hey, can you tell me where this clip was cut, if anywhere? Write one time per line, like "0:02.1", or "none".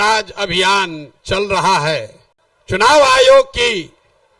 0:02.9

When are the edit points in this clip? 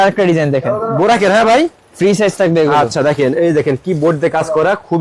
none

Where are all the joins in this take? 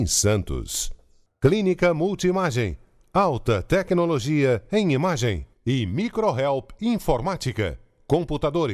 none

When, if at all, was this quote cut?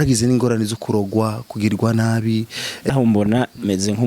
0:02.9

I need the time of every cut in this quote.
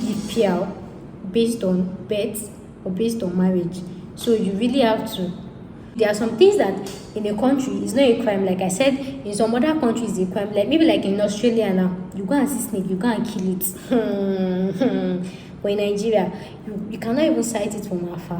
0:05.9

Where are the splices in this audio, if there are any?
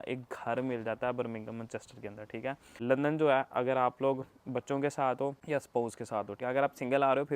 0:02.7
0:05.4
0:06.3

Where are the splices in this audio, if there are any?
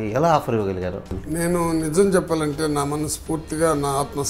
0:01.1

